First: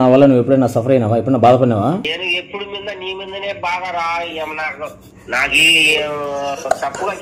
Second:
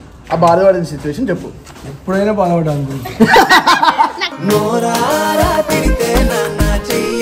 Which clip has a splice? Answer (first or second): first